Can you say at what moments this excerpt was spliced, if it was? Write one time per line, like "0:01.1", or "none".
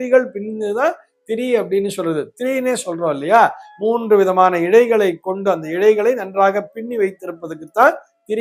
none